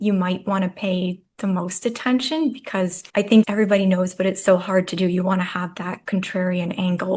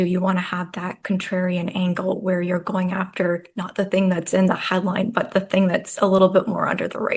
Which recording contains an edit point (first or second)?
first